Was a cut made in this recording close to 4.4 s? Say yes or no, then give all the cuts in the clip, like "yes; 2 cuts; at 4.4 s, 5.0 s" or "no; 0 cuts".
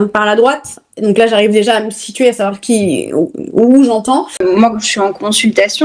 yes; 1 cut; at 4.4 s